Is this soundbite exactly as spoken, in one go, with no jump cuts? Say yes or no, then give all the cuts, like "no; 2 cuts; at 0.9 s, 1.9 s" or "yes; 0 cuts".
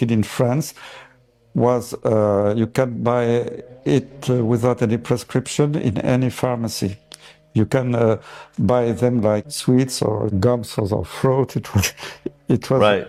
yes; 0 cuts